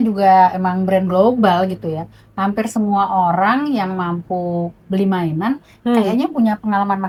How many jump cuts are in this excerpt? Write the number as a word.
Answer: zero